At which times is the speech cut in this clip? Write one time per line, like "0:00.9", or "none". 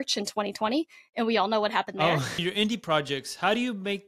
0:02.4